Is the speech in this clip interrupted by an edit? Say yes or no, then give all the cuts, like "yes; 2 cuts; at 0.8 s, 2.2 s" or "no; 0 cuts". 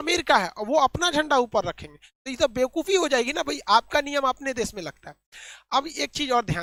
no; 0 cuts